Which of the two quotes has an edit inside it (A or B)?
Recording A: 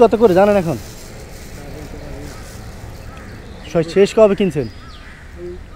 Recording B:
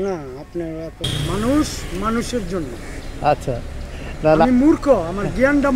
B